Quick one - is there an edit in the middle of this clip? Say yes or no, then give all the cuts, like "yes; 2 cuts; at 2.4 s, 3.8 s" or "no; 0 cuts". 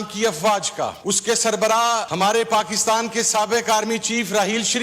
yes; 2 cuts; at 1.0 s, 2.1 s